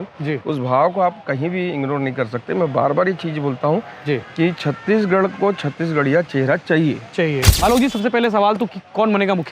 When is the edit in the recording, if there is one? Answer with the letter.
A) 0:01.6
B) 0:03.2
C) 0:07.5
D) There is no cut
C